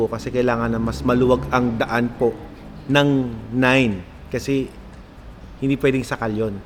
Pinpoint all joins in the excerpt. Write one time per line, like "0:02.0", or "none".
none